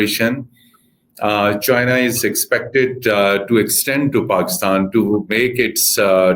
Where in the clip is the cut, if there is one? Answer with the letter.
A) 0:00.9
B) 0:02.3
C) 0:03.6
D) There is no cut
D